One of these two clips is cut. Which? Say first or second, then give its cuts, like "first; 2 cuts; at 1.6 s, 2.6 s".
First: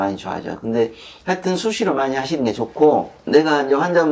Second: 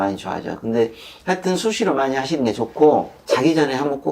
second; 1 cut; at 3.1 s